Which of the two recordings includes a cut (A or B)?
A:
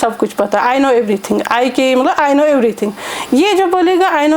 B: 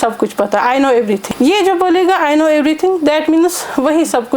B